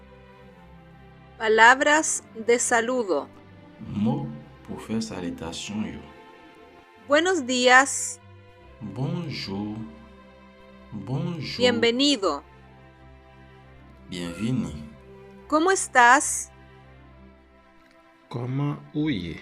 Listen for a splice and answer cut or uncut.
uncut